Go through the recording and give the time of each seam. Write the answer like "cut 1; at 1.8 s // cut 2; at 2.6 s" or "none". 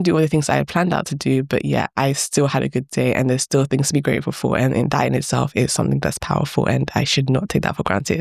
none